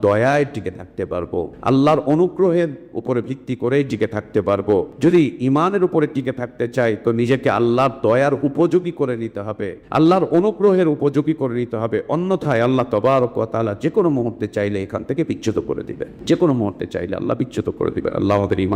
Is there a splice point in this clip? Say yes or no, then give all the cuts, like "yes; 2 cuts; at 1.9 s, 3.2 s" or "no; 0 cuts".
yes; 4 cuts; at 1.5 s, 4.9 s, 9.7 s, 16.2 s